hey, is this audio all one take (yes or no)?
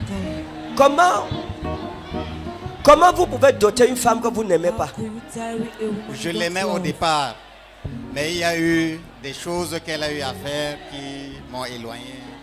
yes